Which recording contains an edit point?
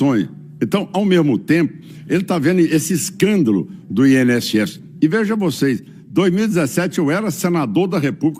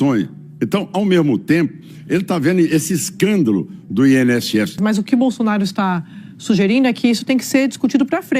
second; 1 cut; at 4.8 s

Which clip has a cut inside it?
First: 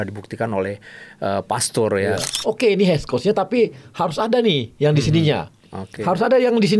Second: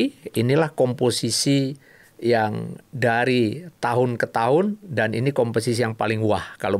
first; 1 cut; at 2.3 s

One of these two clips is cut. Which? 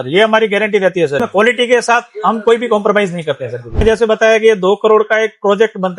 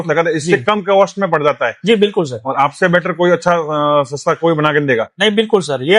first; 2 cuts; at 1.2 s, 3.8 s

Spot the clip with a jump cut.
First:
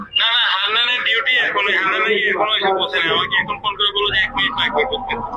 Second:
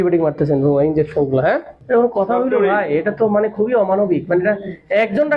second; 1 cut; at 1.7 s

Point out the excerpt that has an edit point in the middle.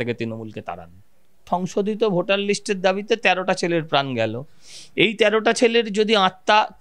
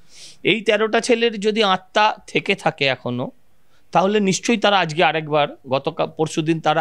first; 1 cut; at 1.5 s

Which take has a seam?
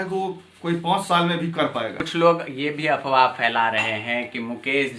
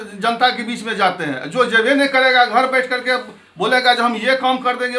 first; 1 cut; at 2.0 s

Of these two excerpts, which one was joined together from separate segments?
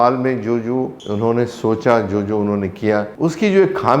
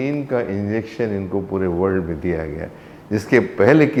first; 2 cuts; at 1.0 s, 3.1 s

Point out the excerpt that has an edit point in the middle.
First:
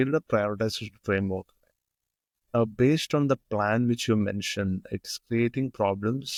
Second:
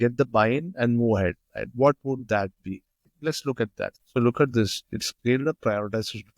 second; 1 cut; at 3.9 s

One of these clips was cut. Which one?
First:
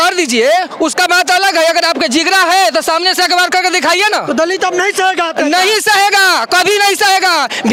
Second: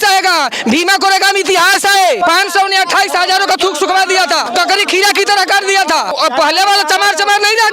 second; 3 cuts; at 2.2 s, 4.5 s, 6.1 s

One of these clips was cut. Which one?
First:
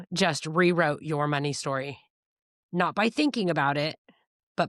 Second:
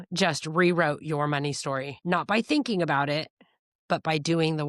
second; 1 cut; at 1.9 s

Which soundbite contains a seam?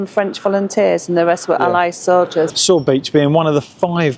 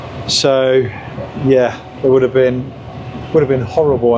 first; 1 cut; at 2.5 s

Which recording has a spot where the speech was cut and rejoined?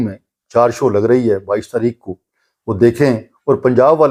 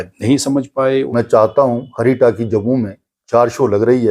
second; 1 cut; at 1.1 s

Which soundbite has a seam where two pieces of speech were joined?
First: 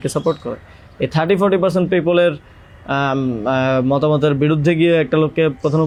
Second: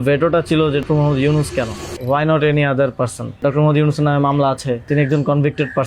second; 4 cuts; at 0.8 s, 1.9 s, 3.4 s, 4.9 s

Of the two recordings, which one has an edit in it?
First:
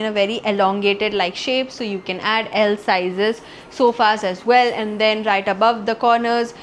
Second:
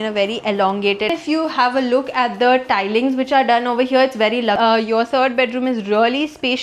second; 2 cuts; at 1.1 s, 4.6 s

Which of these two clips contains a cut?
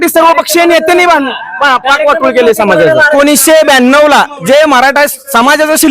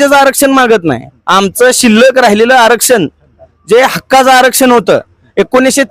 first; 1 cut; at 3.1 s

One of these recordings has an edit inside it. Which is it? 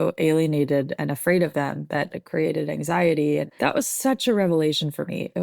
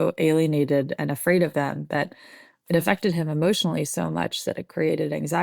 first; 2 cuts; at 2.2 s, 3.5 s

